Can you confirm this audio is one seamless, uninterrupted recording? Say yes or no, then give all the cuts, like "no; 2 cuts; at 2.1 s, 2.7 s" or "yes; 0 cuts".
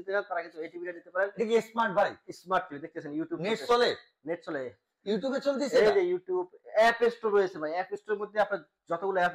yes; 0 cuts